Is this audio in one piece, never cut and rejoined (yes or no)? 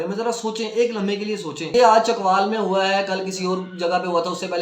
no